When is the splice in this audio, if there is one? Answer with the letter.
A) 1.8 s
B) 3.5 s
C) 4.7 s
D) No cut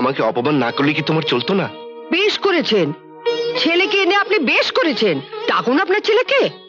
D